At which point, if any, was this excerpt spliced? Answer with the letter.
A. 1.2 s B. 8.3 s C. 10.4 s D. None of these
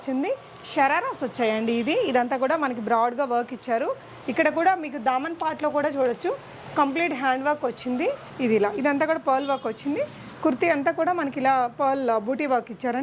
B